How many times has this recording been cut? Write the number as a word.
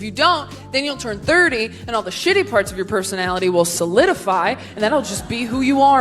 zero